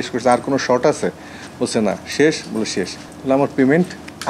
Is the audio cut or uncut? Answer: uncut